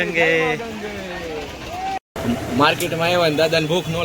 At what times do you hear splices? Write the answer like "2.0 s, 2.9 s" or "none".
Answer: 2.0 s